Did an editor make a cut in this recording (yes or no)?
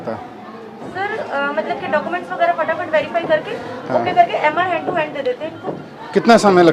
no